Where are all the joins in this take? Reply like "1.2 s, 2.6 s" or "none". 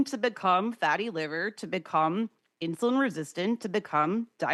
none